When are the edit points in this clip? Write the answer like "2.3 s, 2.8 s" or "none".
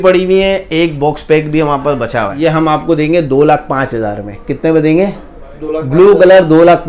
2.3 s